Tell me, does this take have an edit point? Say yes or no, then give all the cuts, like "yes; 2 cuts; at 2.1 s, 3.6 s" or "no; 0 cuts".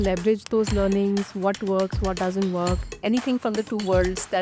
no; 0 cuts